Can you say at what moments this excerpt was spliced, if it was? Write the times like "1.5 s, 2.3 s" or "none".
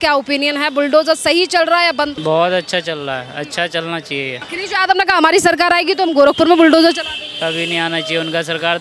2.2 s, 4.4 s